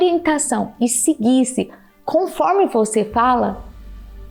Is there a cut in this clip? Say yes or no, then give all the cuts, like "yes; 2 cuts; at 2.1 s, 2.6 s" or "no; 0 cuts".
no; 0 cuts